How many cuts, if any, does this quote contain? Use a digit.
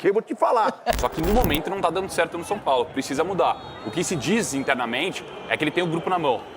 1